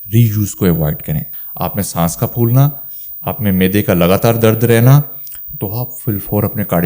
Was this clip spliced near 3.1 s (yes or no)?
no